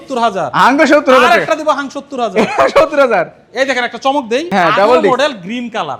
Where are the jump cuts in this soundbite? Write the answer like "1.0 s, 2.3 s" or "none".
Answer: none